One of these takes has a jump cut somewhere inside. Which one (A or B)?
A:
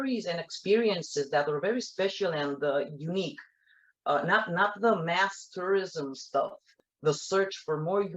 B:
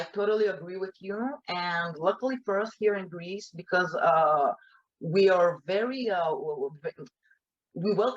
A